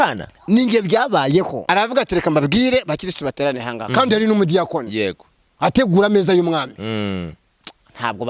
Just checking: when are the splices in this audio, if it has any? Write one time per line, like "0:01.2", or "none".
0:01.6